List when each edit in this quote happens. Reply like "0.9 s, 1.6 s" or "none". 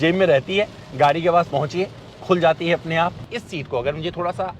3.3 s